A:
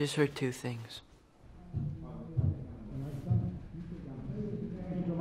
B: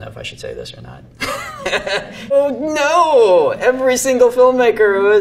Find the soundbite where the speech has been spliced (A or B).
B